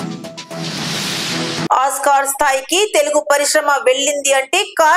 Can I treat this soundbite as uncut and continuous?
yes; 0 cuts

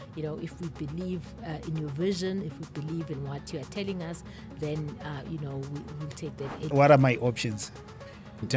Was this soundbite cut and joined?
yes; 1 cut; at 6.7 s

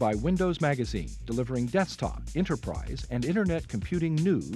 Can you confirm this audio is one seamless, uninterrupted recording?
yes; 0 cuts

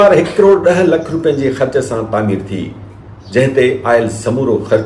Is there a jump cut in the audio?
no; 0 cuts

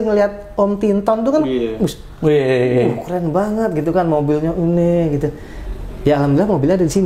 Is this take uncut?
yes; 0 cuts

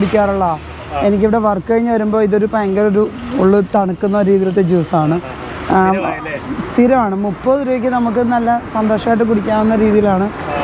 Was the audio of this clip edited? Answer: no; 0 cuts

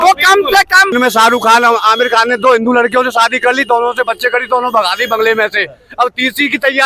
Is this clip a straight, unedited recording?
no; 1 cut; at 0.9 s

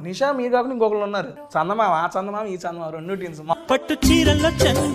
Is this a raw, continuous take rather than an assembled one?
no; 2 cuts; at 1.4 s, 3.5 s

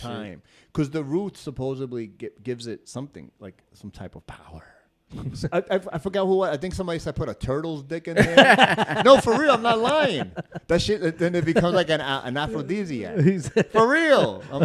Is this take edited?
yes; 1 cut; at 5.0 s

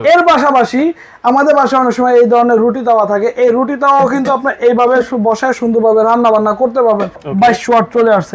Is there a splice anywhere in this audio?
yes; 1 cut; at 7.2 s

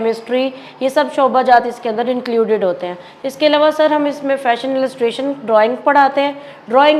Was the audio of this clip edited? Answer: no; 0 cuts

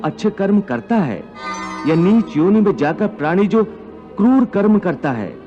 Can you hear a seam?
yes; 1 cut; at 1.7 s

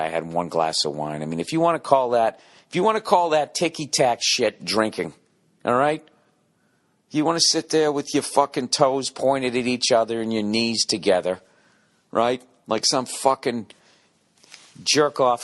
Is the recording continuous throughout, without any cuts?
no; 1 cut; at 2.1 s

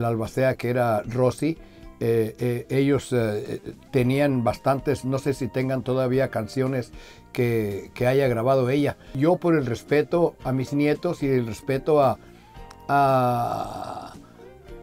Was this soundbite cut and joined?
yes; 1 cut; at 9.1 s

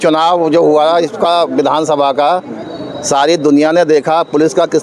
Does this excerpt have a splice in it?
no; 0 cuts

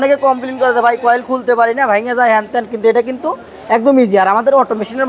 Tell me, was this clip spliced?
no; 0 cuts

